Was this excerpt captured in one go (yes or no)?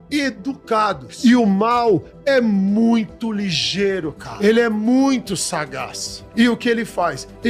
no